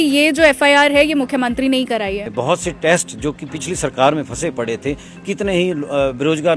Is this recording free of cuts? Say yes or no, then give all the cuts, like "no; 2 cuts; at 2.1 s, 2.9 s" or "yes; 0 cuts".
no; 1 cut; at 2.3 s